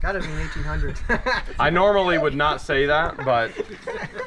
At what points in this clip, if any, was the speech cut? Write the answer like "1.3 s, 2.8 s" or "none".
none